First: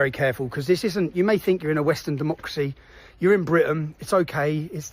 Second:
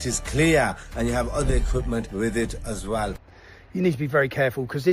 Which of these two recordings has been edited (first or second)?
second